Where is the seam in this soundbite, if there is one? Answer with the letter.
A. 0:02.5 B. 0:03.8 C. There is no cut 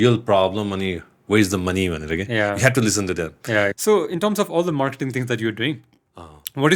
B